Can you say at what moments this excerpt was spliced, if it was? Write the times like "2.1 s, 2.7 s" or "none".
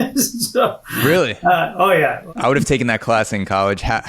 2.2 s